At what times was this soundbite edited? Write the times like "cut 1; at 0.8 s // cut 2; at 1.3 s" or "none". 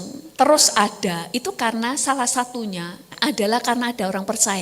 cut 1; at 3.0 s